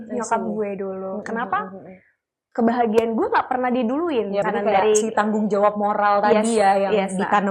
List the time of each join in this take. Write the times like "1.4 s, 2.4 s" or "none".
4.5 s